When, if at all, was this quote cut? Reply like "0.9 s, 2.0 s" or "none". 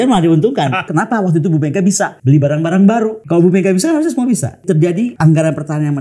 0.9 s, 2.2 s, 3.2 s, 5.0 s